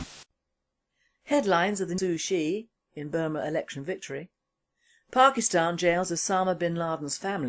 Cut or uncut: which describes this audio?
uncut